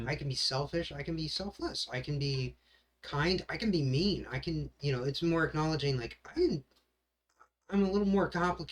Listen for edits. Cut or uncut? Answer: uncut